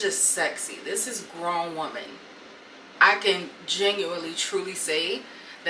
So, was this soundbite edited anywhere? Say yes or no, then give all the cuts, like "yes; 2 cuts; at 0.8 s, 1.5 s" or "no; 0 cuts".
yes; 1 cut; at 2.9 s